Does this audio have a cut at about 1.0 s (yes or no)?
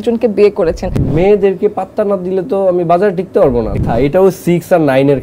yes